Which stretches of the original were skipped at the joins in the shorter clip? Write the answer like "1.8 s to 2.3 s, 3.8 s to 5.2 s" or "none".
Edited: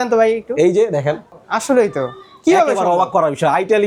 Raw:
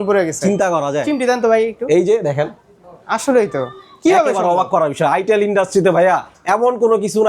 2.7 s to 2.9 s